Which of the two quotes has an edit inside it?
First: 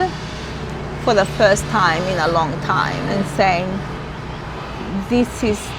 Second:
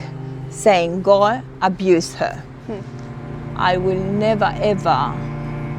second; 1 cut; at 3.4 s

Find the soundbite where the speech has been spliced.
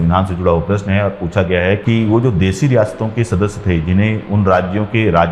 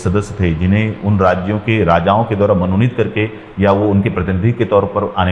first; 1 cut; at 1.8 s

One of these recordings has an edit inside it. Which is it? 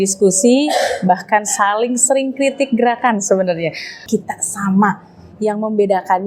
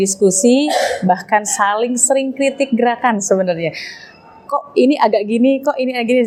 first; 1 cut; at 4.0 s

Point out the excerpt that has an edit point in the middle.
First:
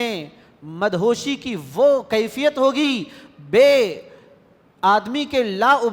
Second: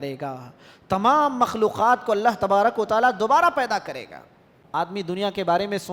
second; 1 cut; at 5.0 s

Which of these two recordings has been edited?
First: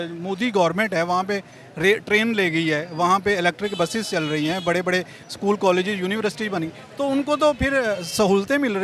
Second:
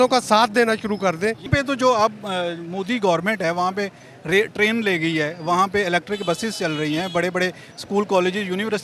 second; 1 cut; at 1.5 s

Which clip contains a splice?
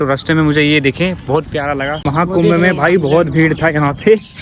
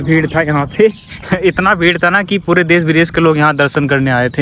first; 1 cut; at 2.1 s

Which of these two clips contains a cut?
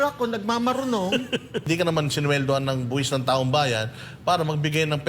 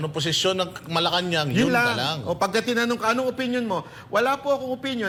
first; 1 cut; at 1.6 s

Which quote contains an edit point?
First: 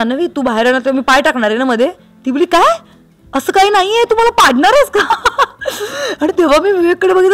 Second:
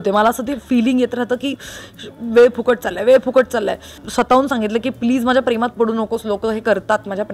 second; 1 cut; at 4.0 s

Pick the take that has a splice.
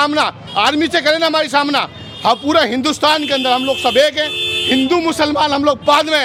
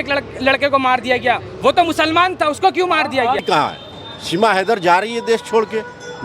second; 1 cut; at 3.4 s

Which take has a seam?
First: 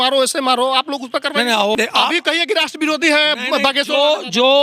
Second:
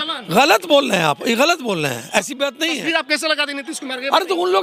first; 1 cut; at 1.8 s

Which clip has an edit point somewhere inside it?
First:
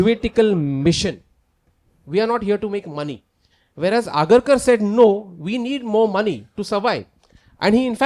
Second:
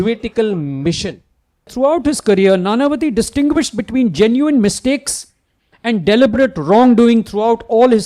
second; 1 cut; at 1.7 s

